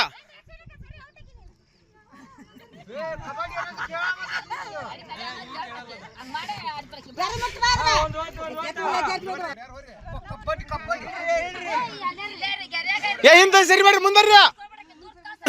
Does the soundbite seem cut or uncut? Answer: cut